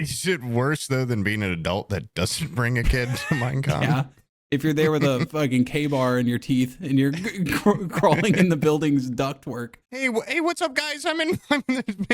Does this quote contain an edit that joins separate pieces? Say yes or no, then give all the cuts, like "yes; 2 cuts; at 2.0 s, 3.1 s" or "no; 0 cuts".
yes; 1 cut; at 10.1 s